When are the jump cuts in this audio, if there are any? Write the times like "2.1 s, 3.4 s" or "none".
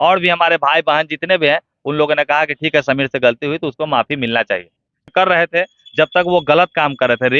5.1 s